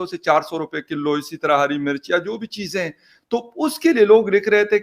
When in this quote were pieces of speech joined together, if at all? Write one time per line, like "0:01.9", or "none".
none